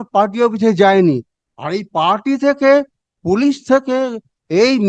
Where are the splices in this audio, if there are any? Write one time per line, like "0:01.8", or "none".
none